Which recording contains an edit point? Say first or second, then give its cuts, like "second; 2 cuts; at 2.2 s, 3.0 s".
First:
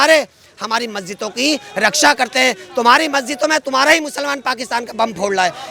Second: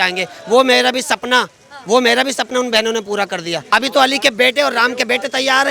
second; 1 cut; at 3.6 s